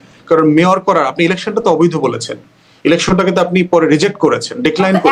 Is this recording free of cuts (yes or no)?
yes